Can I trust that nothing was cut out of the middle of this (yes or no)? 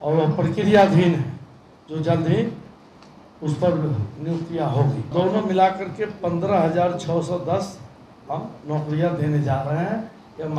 no